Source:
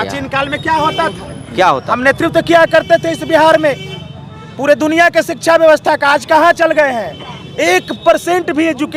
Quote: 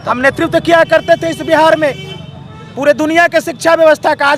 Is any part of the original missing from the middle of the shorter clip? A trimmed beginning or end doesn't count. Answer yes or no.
no